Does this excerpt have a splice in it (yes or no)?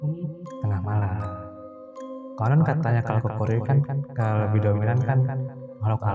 no